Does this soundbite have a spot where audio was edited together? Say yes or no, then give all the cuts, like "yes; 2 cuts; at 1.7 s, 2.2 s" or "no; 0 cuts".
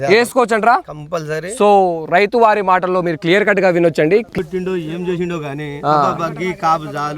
yes; 1 cut; at 4.4 s